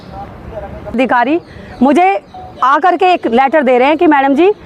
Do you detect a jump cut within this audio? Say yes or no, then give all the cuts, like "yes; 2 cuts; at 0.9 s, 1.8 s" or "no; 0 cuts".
yes; 1 cut; at 1.0 s